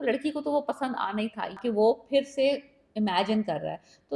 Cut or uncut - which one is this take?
cut